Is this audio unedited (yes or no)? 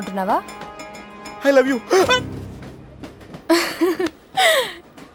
yes